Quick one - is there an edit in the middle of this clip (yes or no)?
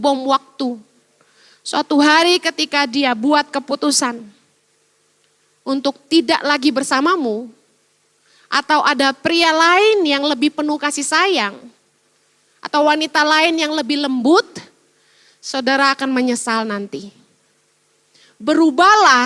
no